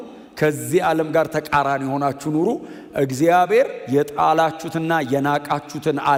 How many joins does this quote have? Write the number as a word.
zero